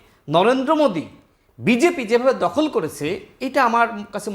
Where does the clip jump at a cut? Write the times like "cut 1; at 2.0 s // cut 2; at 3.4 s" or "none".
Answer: none